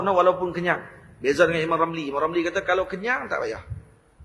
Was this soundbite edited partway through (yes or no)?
no